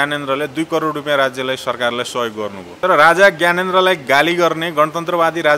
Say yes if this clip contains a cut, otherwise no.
yes